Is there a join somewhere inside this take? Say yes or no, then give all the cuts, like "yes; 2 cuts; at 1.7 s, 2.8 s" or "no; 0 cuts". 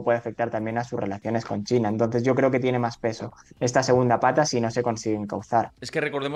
no; 0 cuts